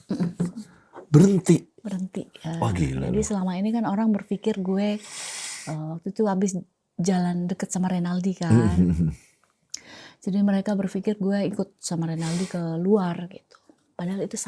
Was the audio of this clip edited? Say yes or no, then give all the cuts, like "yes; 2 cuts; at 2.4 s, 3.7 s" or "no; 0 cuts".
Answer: no; 0 cuts